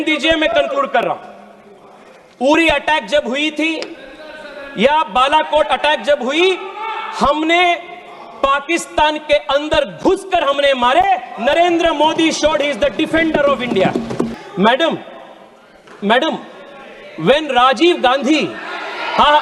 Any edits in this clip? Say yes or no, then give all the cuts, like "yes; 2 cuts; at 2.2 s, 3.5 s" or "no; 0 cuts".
yes; 1 cut; at 14.3 s